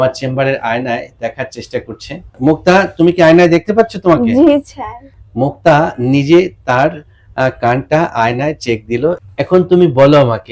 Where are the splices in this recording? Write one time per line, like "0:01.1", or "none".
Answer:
none